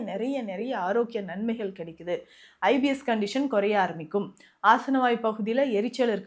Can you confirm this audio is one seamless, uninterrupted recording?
yes; 0 cuts

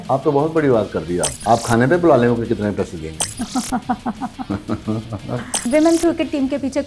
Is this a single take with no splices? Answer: no; 3 cuts; at 1.3 s, 3.2 s, 5.5 s

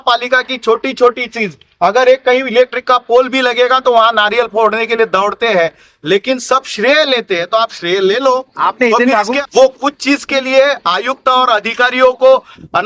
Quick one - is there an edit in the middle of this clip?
yes; 1 cut; at 9.4 s

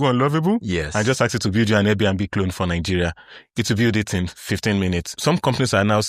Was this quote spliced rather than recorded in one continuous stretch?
yes; 1 cut; at 5.2 s

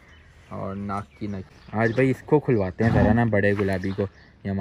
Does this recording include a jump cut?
yes; 1 cut; at 1.4 s

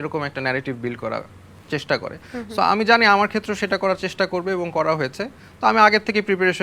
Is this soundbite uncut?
yes; 0 cuts

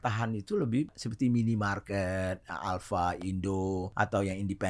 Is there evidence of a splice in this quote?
yes; 2 cuts; at 1.0 s, 3.9 s

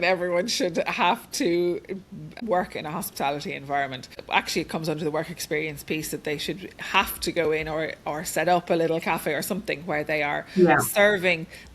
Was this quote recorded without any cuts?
no; 2 cuts; at 2.2 s, 4.2 s

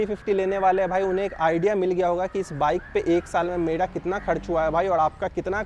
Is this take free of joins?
yes; 0 cuts

